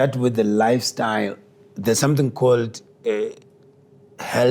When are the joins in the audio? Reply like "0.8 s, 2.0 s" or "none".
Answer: none